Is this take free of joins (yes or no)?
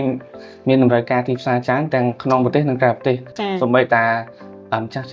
no